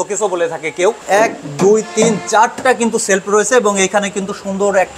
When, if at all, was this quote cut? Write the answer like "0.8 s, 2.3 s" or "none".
1.0 s